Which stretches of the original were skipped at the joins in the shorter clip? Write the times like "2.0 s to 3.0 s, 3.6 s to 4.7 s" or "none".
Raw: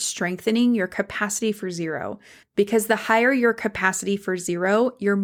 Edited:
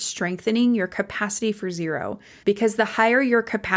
2.3 s to 2.4 s